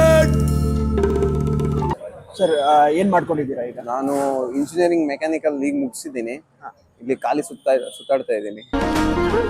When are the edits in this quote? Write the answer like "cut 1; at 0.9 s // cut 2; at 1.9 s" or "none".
cut 1; at 2.1 s